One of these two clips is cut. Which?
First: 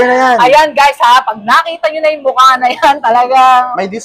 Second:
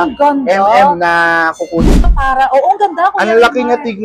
second; 1 cut; at 1.9 s

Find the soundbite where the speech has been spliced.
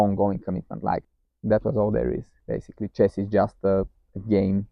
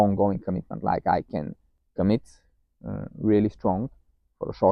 first; 1 cut; at 1.0 s

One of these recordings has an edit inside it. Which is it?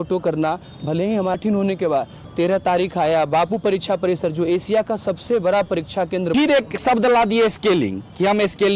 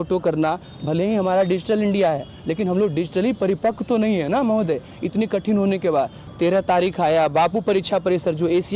first; 2 cuts; at 1.3 s, 6.3 s

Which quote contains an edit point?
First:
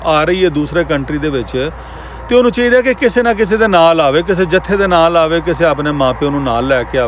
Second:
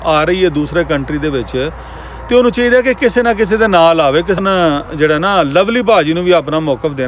second; 1 cut; at 4.4 s

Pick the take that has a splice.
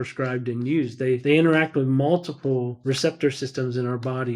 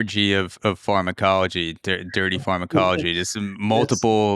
first; 2 cuts; at 1.2 s, 2.7 s

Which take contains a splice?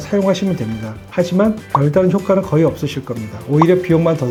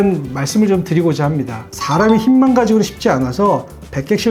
second; 1 cut; at 1.8 s

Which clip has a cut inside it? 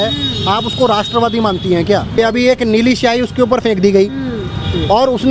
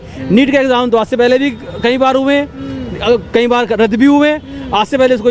first; 1 cut; at 2.2 s

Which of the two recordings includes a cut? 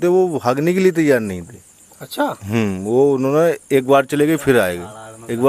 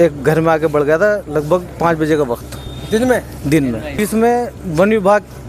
second; 1 cut; at 4.0 s

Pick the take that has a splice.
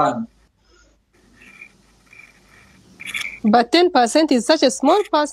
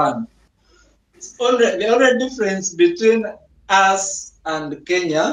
second; 1 cut; at 1.3 s

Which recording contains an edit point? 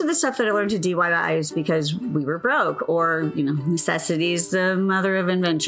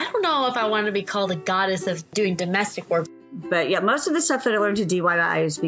second; 2 cuts; at 2.1 s, 3.2 s

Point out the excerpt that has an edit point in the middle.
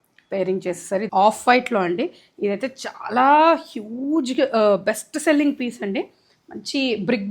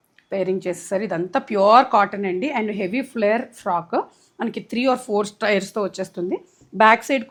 first; 1 cut; at 1.1 s

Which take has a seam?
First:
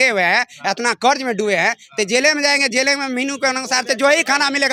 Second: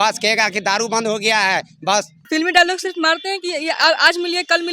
second; 1 cut; at 2.3 s

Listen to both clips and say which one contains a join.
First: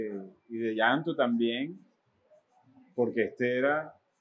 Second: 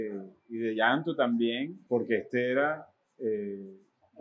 second; 1 cut; at 1.8 s

